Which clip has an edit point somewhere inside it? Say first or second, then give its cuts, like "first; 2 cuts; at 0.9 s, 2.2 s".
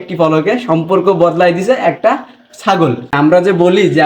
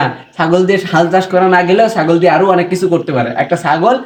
first; 1 cut; at 3.1 s